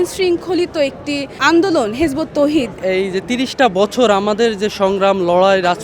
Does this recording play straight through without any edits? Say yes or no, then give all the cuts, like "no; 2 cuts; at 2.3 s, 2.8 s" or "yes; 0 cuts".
no; 2 cuts; at 1.3 s, 2.8 s